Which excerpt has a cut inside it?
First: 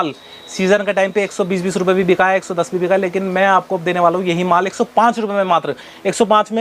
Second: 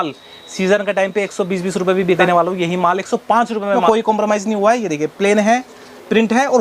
second; 2 cuts; at 2.2 s, 3.8 s

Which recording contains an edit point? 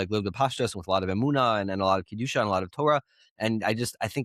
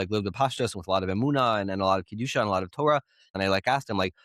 second; 1 cut; at 3.3 s

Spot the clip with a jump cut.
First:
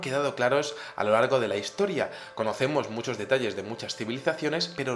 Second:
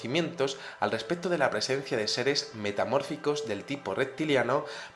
first; 1 cut; at 3.6 s

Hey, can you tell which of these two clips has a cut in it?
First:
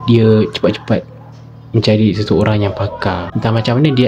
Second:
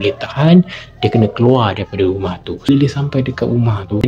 second; 1 cut; at 2.7 s

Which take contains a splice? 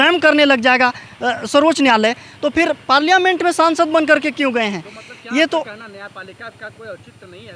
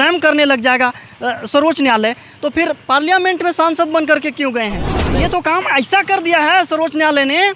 second; 1 cut; at 5.1 s

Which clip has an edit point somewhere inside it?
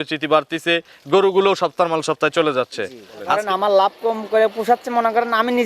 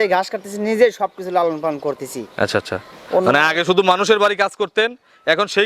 first; 1 cut; at 3.3 s

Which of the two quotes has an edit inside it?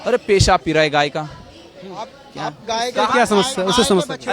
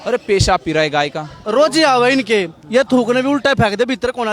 second; 1 cut; at 1.4 s

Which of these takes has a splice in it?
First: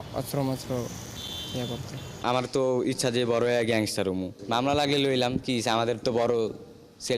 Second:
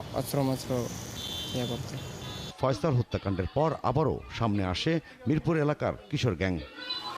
first; 1 cut; at 2.1 s

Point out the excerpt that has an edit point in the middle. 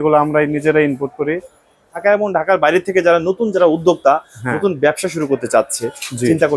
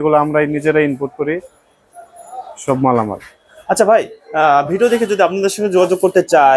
first; 1 cut; at 2.0 s

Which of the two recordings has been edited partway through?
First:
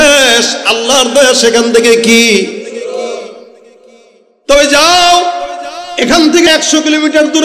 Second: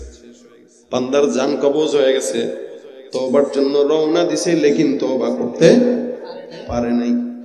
first; 1 cut; at 6.5 s

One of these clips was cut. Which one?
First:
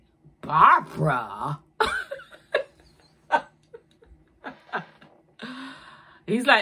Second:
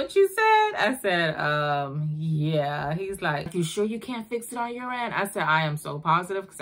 second; 1 cut; at 3.5 s

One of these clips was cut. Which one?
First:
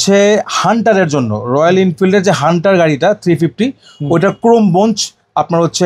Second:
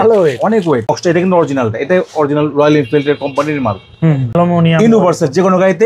second; 2 cuts; at 0.9 s, 4.3 s

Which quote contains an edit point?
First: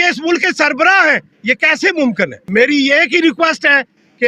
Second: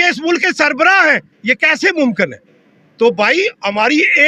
first; 1 cut; at 2.4 s

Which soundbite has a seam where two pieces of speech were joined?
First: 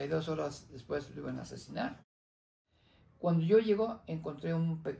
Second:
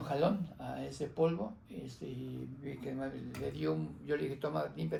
first; 1 cut; at 2.5 s

